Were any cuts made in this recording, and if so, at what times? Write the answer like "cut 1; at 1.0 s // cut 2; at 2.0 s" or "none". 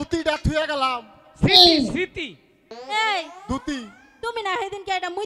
none

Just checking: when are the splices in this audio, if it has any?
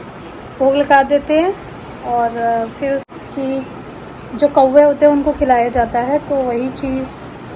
cut 1; at 3.0 s

